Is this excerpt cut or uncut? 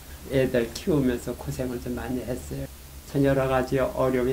cut